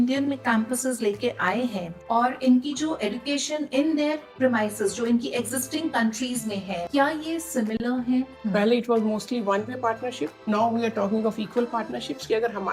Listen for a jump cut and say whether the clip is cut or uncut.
cut